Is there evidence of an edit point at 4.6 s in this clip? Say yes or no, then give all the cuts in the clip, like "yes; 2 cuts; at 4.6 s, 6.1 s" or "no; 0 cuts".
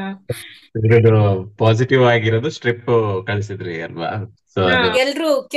yes; 1 cut; at 4.6 s